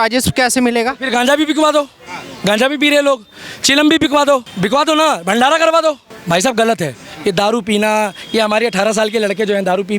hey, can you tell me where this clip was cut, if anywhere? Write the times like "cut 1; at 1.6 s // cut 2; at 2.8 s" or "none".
cut 1; at 4.5 s // cut 2; at 6.1 s